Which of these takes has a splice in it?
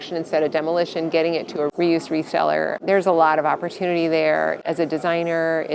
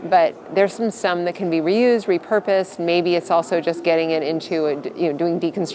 first; 3 cuts; at 1.7 s, 2.8 s, 4.6 s

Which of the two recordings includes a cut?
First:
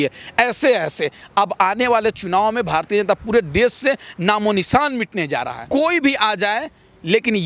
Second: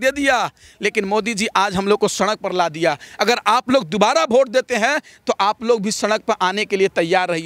first; 1 cut; at 5.5 s

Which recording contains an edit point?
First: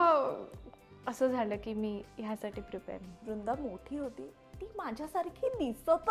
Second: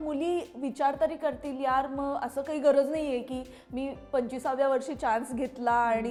first; 1 cut; at 3.2 s

